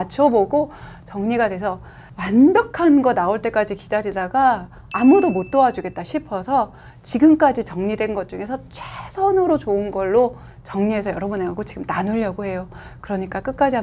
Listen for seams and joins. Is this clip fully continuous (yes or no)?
yes